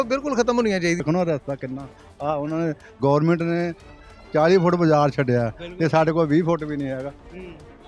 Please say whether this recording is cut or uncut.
cut